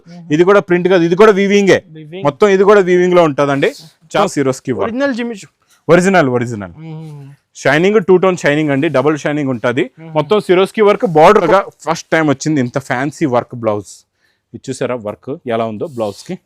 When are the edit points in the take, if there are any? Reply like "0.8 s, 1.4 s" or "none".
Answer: 4.1 s, 11.4 s